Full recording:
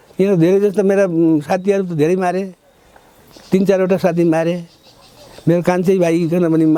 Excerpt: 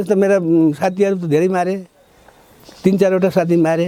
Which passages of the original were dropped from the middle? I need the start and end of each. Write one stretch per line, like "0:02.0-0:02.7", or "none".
none